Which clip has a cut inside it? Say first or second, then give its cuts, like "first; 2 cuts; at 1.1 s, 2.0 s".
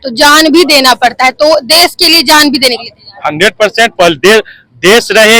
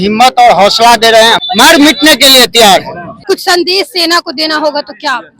second; 2 cuts; at 1.4 s, 3.0 s